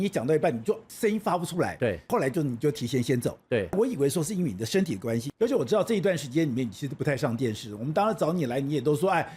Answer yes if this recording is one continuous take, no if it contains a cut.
no